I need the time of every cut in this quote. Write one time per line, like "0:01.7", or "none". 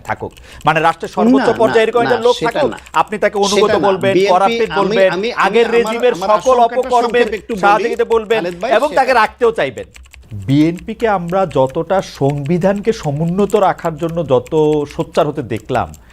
0:10.3